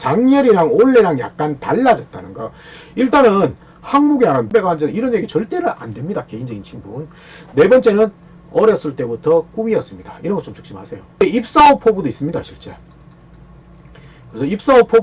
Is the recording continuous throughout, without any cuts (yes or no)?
no